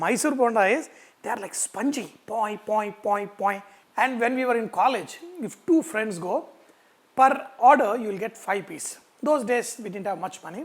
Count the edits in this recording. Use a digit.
1